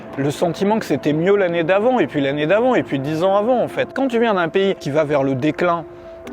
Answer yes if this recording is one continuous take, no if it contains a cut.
no